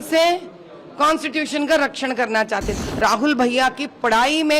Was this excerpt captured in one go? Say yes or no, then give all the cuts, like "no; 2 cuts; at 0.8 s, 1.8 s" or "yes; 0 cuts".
no; 1 cut; at 2.7 s